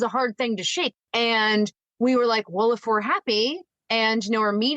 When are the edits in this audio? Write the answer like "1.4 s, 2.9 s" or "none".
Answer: 0.9 s